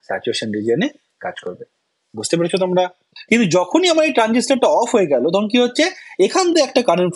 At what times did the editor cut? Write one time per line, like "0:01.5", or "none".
0:03.1